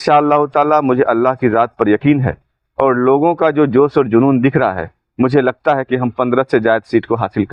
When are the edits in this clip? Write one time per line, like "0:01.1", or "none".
none